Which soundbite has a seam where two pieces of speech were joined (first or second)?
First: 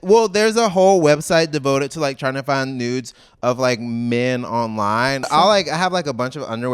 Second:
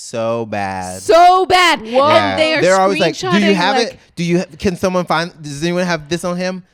first